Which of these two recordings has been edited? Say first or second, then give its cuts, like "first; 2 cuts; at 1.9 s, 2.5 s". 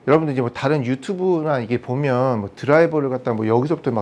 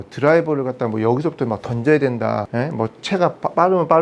second; 1 cut; at 2.5 s